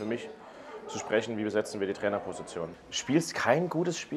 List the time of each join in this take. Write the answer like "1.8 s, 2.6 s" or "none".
2.8 s